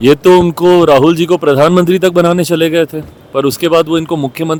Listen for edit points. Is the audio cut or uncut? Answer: uncut